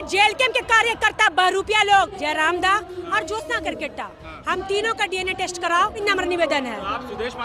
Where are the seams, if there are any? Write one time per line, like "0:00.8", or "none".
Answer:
0:02.2
0:06.0

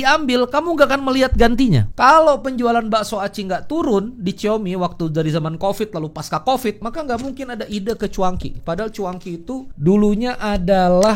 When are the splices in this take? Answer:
0:01.9
0:06.8
0:09.7

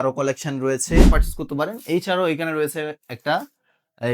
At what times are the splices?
0:01.1

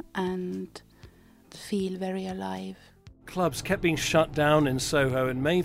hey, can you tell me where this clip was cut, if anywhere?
0:01.5
0:03.2

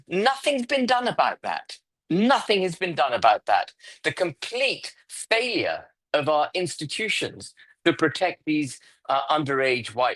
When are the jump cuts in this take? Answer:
none

